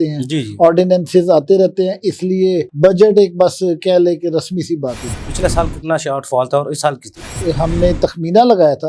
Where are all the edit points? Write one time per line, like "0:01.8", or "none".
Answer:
0:05.1
0:07.3